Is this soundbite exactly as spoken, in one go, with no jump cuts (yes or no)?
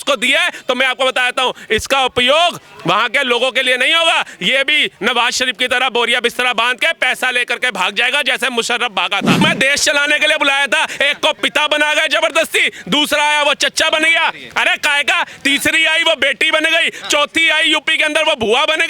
no